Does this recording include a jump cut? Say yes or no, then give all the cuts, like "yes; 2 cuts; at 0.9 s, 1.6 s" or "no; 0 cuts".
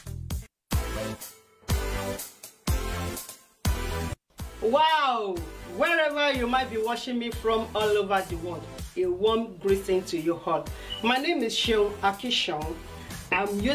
yes; 1 cut; at 4.1 s